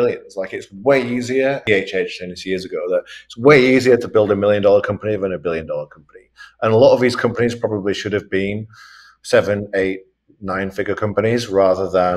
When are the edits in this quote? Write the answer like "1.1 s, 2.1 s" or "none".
1.6 s